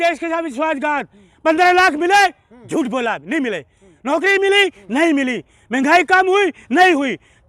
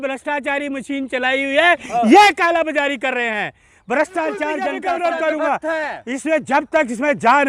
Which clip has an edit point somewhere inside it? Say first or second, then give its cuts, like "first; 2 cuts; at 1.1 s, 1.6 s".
second; 1 cut; at 4.7 s